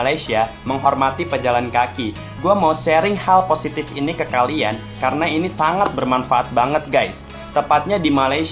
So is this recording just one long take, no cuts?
yes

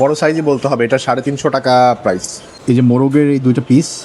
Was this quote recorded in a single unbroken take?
no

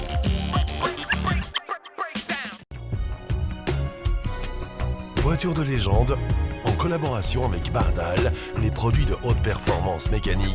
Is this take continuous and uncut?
no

